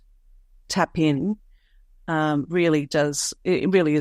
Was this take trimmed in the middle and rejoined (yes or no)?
no